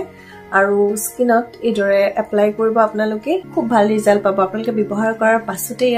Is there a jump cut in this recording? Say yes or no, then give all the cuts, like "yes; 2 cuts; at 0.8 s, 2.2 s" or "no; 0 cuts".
yes; 1 cut; at 3.5 s